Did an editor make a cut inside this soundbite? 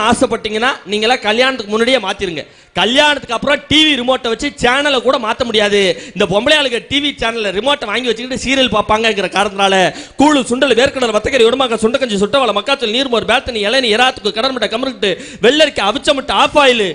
no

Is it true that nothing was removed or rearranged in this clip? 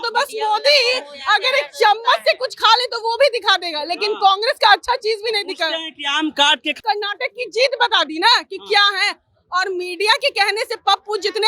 no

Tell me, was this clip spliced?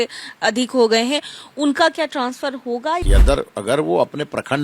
yes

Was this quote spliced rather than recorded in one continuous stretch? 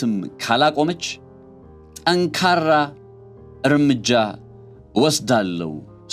no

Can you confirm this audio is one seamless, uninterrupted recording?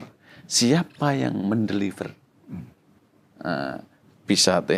yes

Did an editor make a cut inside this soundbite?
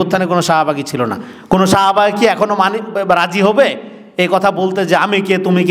no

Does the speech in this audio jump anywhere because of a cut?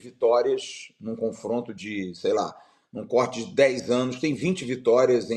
no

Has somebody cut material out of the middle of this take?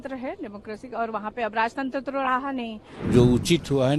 yes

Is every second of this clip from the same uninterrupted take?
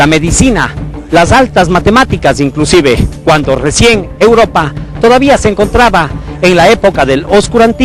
no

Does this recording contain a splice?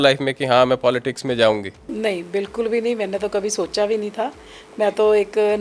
no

